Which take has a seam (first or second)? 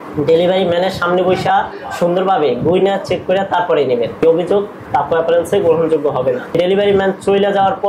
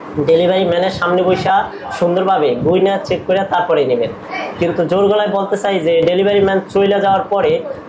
first